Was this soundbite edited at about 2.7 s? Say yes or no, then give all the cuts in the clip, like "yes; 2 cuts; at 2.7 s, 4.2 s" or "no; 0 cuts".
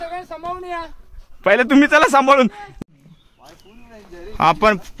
yes; 1 cut; at 2.7 s